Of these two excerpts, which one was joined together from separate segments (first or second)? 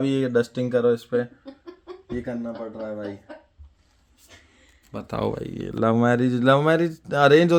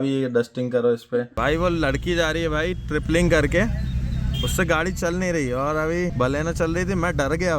second